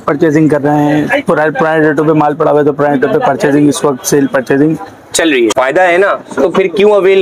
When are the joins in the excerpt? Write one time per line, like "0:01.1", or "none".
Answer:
0:05.5

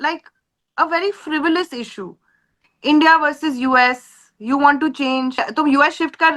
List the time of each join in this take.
0:05.4

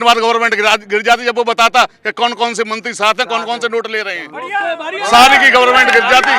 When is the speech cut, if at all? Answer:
none

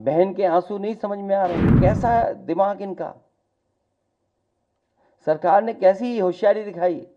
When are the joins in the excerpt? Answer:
0:01.8

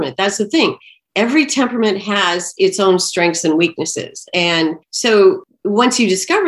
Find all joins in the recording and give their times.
0:04.9
0:05.4

